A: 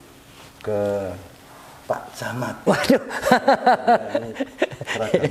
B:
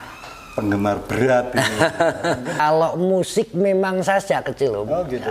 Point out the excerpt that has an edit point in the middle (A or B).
B